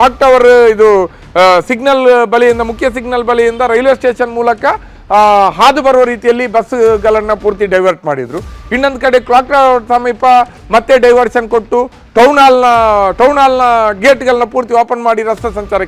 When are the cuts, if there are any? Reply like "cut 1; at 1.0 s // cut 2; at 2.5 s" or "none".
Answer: none